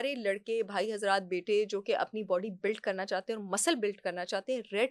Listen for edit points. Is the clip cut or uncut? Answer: uncut